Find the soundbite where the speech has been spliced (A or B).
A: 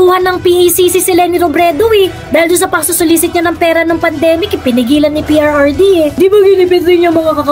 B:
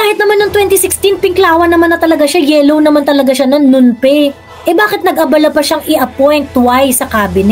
A